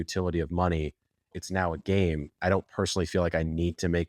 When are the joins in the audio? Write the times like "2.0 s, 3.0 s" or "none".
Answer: 1.3 s, 2.3 s